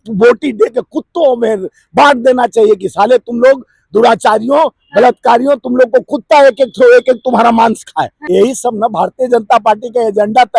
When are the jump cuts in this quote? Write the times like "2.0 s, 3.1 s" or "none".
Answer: 8.2 s